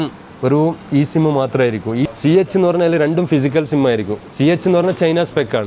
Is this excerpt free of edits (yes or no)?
no